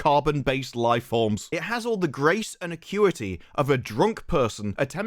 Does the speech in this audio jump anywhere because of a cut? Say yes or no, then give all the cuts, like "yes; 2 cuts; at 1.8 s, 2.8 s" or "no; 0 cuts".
yes; 1 cut; at 1.4 s